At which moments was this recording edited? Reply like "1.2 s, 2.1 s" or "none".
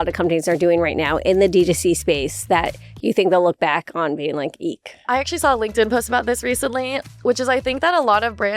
5.1 s